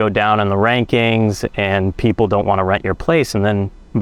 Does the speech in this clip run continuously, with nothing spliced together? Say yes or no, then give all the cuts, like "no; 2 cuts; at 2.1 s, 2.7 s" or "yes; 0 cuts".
yes; 0 cuts